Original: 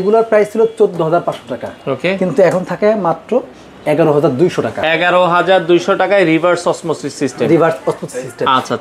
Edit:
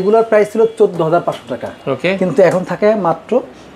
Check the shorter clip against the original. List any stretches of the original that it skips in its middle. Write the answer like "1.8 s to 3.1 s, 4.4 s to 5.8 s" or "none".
none